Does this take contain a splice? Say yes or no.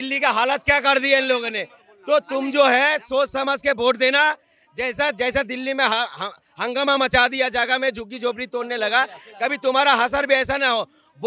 no